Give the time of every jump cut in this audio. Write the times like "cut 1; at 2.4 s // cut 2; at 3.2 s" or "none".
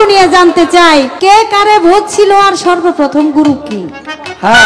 cut 1; at 1.1 s